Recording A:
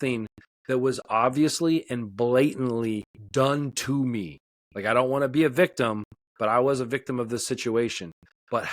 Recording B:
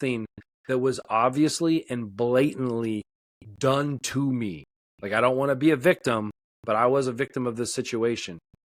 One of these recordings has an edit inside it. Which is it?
A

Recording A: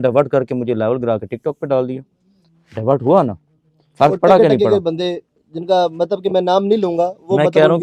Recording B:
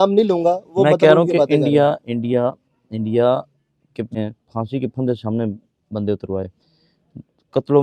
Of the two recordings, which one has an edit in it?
B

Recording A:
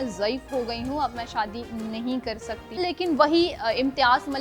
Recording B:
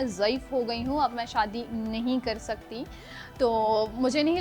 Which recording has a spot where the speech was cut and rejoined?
A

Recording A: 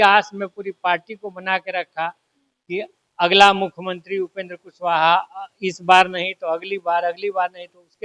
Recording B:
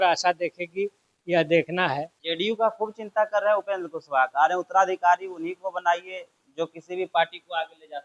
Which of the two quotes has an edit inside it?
B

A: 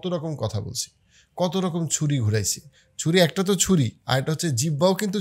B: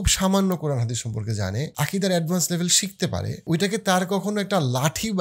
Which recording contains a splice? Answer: B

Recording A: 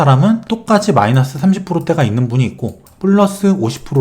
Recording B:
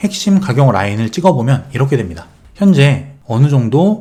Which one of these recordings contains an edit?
A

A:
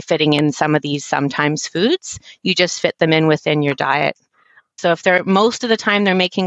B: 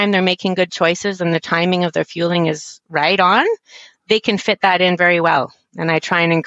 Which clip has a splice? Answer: A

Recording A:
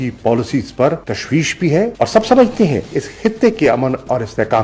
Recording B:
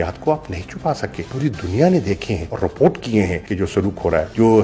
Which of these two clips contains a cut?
A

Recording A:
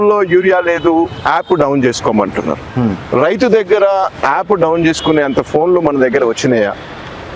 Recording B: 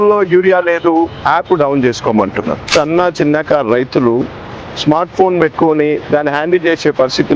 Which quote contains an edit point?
B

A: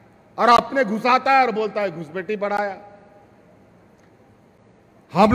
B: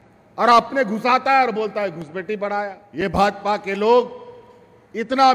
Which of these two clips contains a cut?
B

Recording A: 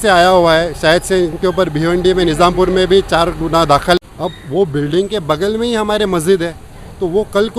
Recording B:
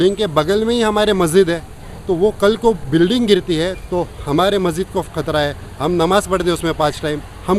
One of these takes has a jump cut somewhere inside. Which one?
A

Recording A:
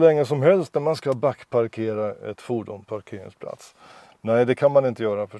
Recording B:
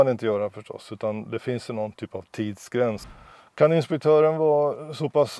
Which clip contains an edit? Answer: B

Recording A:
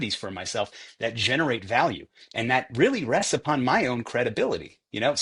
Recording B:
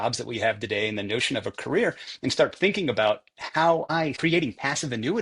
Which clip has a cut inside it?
B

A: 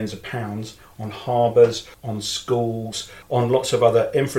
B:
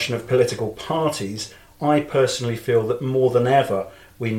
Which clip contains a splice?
A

